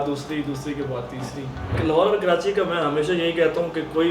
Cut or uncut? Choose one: cut